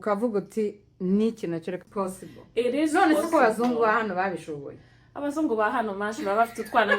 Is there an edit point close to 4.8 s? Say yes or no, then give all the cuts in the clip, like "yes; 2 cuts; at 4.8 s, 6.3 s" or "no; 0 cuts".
no; 1 cut; at 1.8 s